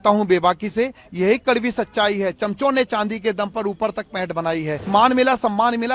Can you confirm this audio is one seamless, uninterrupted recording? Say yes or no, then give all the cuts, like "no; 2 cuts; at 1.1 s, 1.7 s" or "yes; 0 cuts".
no; 1 cut; at 4.9 s